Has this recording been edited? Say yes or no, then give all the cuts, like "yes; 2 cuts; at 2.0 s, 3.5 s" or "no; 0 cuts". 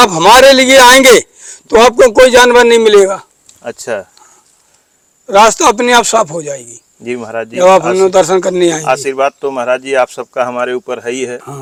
no; 0 cuts